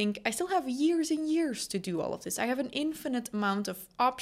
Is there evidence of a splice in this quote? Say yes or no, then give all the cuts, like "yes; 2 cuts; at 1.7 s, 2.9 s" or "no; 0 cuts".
no; 0 cuts